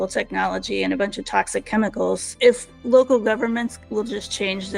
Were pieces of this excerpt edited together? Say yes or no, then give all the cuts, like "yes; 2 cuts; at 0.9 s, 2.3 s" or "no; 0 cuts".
yes; 1 cut; at 2.3 s